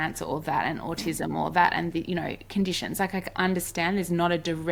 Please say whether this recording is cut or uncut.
uncut